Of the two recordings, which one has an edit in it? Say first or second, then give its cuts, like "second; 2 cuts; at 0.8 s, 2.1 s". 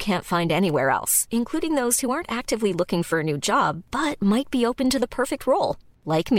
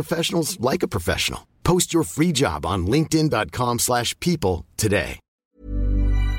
second; 1 cut; at 5.4 s